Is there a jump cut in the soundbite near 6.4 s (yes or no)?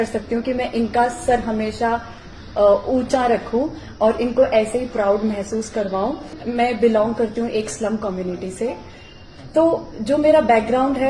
yes